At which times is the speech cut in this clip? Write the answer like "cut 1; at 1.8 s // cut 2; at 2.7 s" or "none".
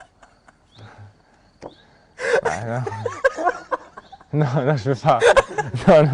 none